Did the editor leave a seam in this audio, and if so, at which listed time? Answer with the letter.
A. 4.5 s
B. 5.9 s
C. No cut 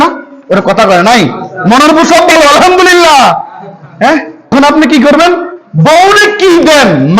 A